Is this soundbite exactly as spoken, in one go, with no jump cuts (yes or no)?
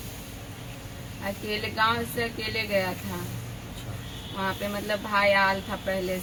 yes